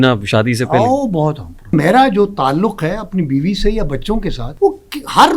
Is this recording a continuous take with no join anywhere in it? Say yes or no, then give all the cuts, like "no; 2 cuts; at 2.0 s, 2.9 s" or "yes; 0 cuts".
no; 2 cuts; at 1.7 s, 4.4 s